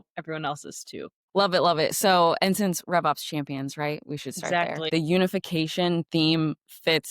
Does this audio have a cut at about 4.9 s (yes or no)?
yes